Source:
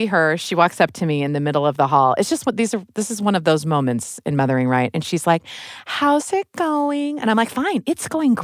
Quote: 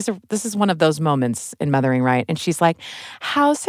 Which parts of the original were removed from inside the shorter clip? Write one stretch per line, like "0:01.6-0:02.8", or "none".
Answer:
none

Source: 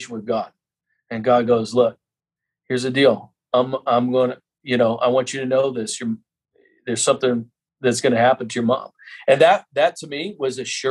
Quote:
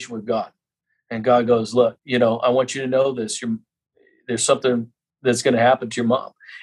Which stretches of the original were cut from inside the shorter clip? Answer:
0:02.0-0:04.6

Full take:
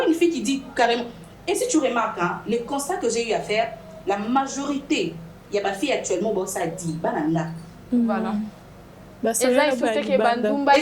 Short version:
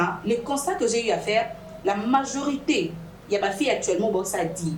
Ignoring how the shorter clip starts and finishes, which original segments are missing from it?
none

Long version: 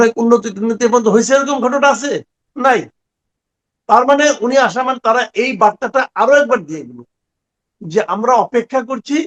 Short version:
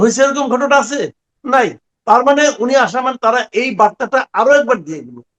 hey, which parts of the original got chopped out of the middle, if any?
0:03.0-0:03.7

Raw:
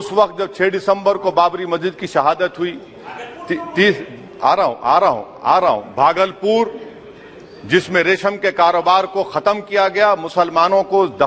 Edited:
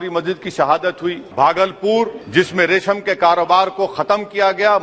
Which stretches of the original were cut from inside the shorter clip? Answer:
0:02.8-0:05.9
0:06.8-0:07.6

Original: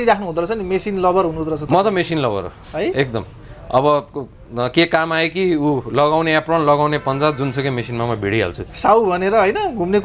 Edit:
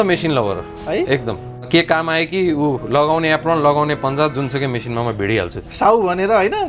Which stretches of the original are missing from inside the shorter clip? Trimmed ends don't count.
0:03.5-0:04.7

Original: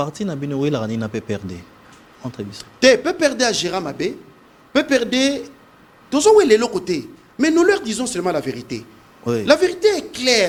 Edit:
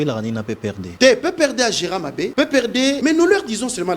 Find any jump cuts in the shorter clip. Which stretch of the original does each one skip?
0:01.5-0:02.7
0:04.1-0:04.7
0:05.3-0:07.3

